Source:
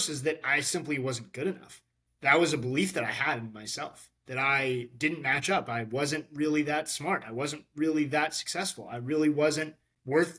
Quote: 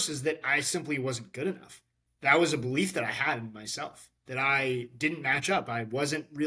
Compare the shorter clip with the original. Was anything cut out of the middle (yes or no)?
no